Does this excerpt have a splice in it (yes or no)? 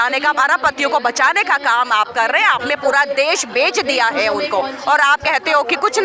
no